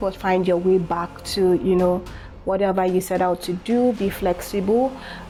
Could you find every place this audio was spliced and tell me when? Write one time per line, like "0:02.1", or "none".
none

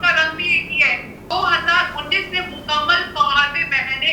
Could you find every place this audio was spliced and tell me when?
0:01.3

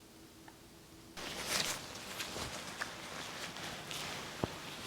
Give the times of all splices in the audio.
0:01.2

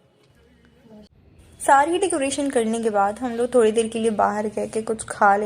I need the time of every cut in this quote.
0:01.1

